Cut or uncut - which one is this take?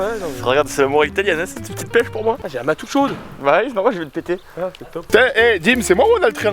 uncut